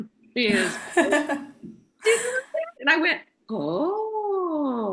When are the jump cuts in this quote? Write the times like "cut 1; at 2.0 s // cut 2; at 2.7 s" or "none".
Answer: cut 1; at 2.7 s